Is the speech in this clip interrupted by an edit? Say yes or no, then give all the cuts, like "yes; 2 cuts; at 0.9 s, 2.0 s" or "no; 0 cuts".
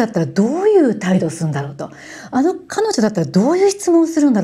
no; 0 cuts